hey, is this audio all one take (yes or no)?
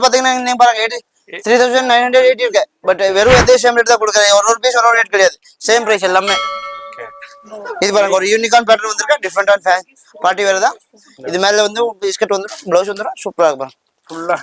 yes